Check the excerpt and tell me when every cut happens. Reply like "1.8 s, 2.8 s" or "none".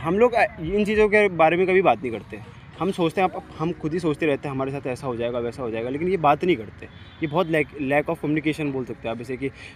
none